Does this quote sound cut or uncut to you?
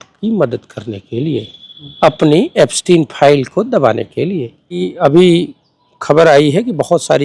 cut